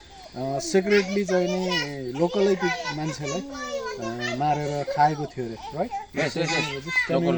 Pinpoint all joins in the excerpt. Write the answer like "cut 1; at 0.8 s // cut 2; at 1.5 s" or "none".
none